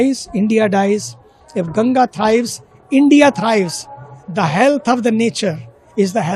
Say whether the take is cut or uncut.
uncut